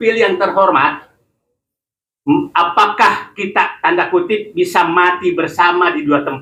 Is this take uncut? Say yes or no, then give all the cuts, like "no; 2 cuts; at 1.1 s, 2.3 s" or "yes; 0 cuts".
yes; 0 cuts